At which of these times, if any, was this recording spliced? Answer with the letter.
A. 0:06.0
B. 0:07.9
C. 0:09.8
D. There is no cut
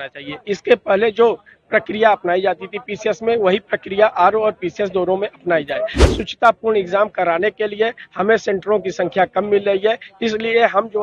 A